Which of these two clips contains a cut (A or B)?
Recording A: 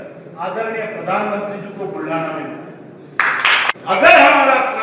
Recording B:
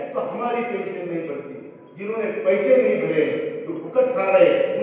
A